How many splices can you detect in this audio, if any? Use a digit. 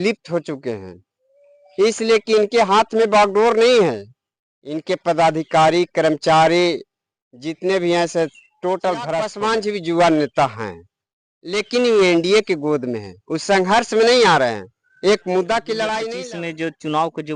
2